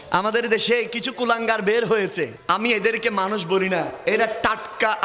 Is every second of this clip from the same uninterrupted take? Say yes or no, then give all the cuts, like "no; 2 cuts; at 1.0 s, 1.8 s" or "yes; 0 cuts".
no; 1 cut; at 2.4 s